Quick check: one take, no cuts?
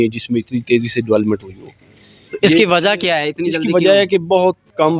yes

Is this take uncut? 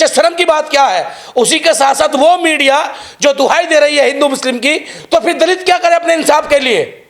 yes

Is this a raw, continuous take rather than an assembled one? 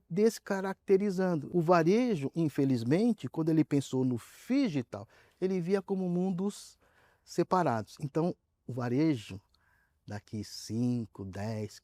no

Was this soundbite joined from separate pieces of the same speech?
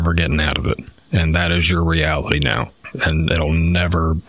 no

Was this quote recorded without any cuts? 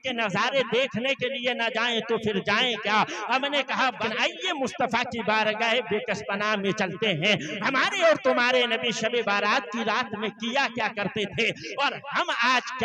no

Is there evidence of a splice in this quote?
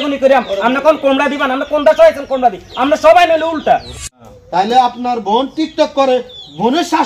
yes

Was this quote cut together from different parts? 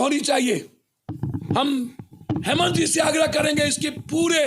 yes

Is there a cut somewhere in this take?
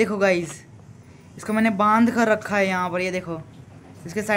no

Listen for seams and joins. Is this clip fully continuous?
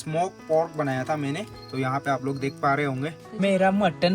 no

